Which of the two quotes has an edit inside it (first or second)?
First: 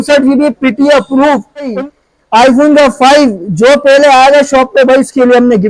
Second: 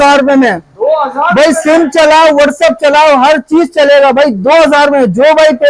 first